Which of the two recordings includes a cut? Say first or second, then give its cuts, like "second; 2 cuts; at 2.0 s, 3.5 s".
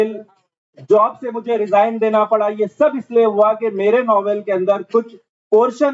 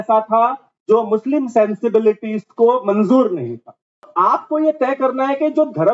second; 1 cut; at 4.1 s